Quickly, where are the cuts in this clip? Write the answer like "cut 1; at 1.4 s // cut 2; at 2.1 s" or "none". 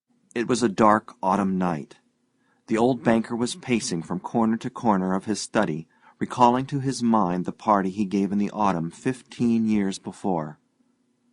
cut 1; at 4.4 s